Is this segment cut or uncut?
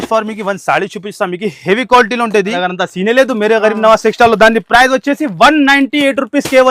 cut